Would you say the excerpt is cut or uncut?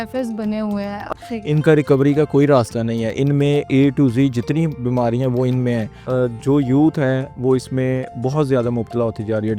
cut